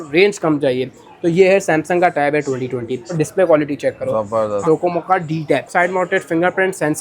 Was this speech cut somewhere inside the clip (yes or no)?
yes